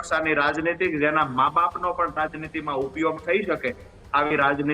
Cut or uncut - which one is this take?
uncut